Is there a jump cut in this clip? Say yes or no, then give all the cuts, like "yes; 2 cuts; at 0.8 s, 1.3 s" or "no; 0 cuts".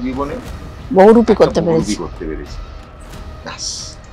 no; 0 cuts